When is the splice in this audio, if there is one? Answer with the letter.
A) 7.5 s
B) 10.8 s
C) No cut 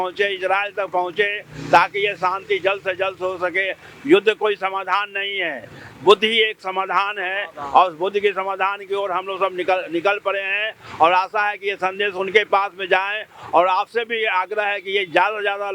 C